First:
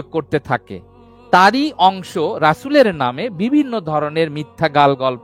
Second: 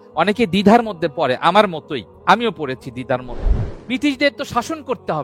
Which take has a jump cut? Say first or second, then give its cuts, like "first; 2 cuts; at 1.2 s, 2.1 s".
second; 1 cut; at 3.7 s